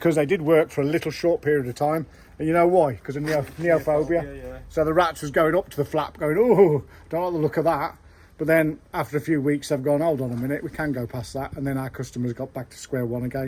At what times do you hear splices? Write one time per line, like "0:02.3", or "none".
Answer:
none